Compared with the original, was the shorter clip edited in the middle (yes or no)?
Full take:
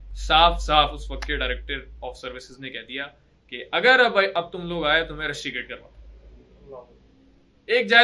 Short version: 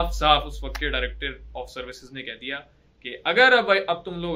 no